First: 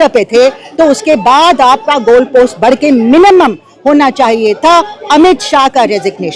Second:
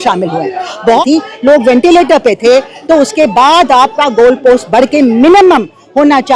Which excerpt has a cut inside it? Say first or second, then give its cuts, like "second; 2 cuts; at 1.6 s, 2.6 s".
second; 1 cut; at 1.0 s